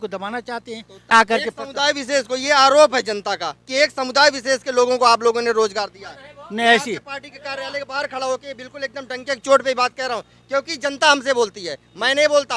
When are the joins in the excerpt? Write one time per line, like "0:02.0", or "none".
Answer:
0:01.1